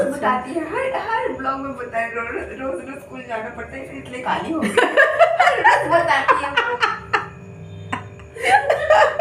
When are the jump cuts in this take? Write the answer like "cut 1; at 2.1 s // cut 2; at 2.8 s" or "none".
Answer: none